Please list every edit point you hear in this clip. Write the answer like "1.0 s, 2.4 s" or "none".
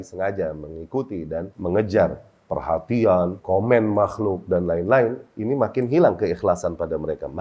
1.5 s, 3.4 s